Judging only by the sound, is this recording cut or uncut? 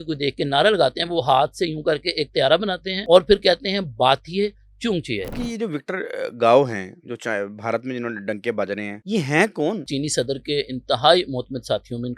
cut